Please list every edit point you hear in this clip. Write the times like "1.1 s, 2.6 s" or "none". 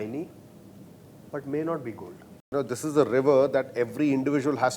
2.5 s